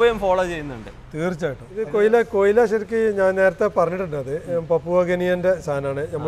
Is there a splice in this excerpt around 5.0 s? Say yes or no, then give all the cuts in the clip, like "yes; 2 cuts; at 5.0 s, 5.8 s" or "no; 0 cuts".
no; 1 cut; at 1.7 s